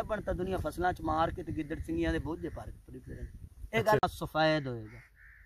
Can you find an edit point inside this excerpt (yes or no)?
yes